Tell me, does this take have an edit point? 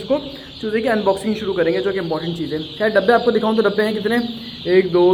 no; 0 cuts

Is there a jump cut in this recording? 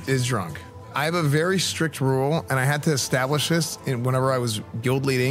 yes; 1 cut; at 0.9 s

